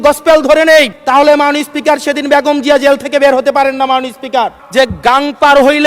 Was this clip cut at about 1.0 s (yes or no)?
yes